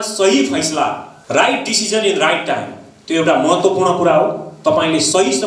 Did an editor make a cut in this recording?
yes; 1 cut; at 1.1 s

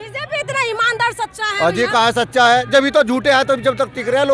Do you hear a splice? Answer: no; 0 cuts

